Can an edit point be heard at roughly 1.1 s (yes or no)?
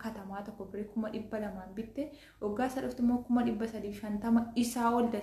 no